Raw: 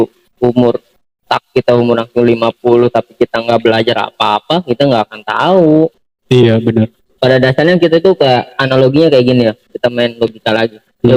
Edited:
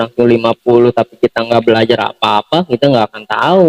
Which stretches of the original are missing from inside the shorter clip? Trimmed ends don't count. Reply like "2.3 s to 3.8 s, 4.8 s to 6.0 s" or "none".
none